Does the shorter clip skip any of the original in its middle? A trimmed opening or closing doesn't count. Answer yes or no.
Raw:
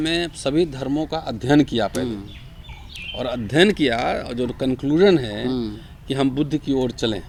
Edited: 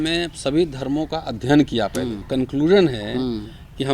yes